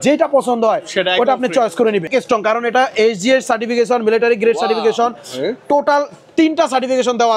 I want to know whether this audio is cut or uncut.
cut